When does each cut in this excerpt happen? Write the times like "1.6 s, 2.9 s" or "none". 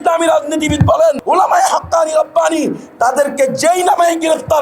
1.2 s